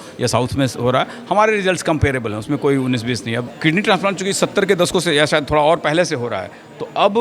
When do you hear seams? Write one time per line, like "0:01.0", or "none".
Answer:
0:03.5